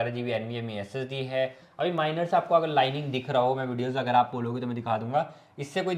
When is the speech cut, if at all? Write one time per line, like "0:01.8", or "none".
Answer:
none